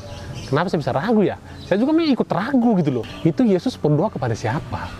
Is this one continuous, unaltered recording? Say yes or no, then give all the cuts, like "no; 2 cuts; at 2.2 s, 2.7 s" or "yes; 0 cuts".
no; 1 cut; at 3.1 s